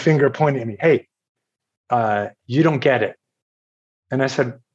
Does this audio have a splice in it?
no; 0 cuts

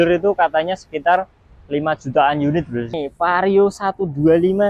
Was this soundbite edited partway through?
yes; 1 cut; at 2.9 s

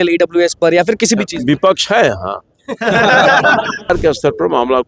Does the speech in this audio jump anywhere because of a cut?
yes; 1 cut; at 3.9 s

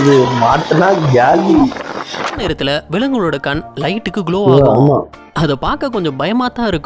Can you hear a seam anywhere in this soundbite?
yes; 1 cut; at 2.4 s

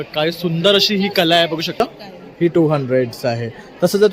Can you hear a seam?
yes; 1 cut; at 1.8 s

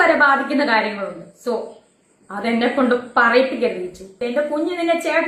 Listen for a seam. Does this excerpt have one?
no; 0 cuts

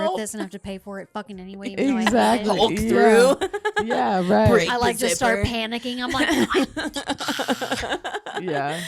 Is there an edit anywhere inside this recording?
no; 0 cuts

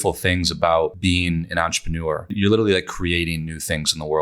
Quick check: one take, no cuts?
no; 2 cuts; at 1.0 s, 2.3 s

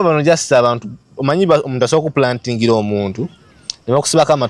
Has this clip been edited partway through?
no; 0 cuts

